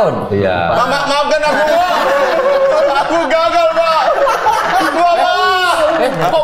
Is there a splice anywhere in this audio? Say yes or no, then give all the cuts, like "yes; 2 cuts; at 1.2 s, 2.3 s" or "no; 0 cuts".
no; 0 cuts